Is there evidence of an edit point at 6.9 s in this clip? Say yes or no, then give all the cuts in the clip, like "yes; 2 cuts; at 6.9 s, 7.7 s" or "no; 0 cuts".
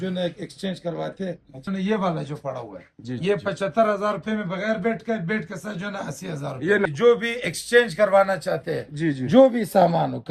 yes; 2 cuts; at 1.7 s, 6.9 s